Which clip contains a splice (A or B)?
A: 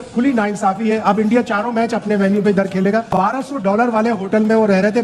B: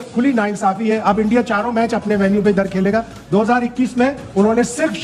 A